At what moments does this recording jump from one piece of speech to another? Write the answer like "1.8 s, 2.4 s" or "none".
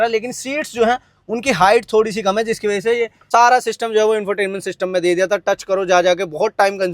3.1 s